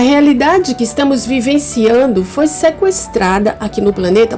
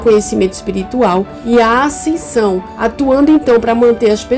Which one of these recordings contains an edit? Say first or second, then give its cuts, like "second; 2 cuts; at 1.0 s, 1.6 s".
second; 2 cuts; at 1.4 s, 2.7 s